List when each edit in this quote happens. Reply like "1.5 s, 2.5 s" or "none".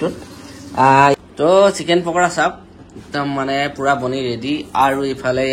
1.1 s